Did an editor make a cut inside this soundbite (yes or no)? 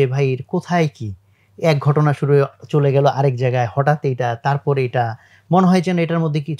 no